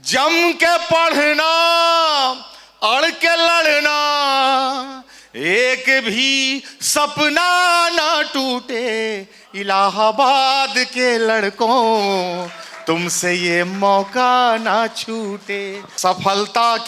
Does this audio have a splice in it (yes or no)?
yes